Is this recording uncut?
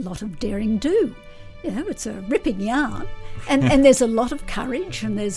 no; 1 cut; at 1.2 s

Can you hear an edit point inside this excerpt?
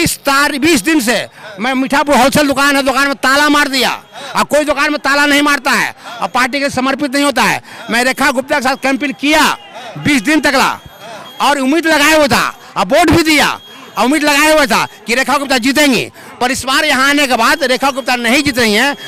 no; 0 cuts

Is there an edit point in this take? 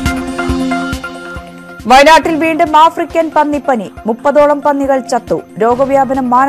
yes; 1 cut; at 1.3 s

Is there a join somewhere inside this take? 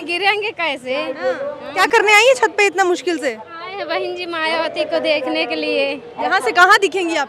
yes; 1 cut; at 1.8 s

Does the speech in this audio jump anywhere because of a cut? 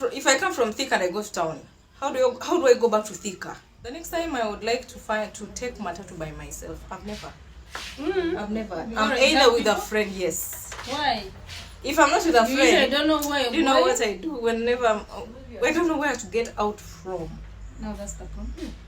yes; 1 cut; at 3.9 s

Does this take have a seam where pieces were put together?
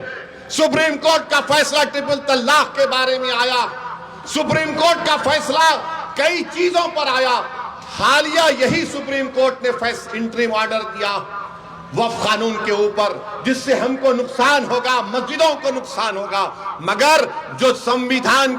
no; 0 cuts

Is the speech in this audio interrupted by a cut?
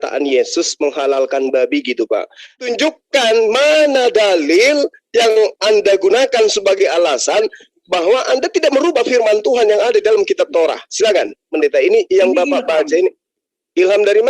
yes; 2 cuts; at 2.4 s, 11.5 s

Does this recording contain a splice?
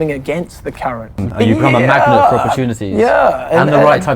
no; 0 cuts

